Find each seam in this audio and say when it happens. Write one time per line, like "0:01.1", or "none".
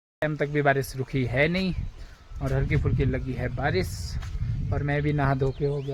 none